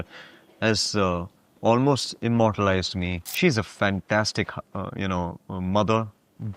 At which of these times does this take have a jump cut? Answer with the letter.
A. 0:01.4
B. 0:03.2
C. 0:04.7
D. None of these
B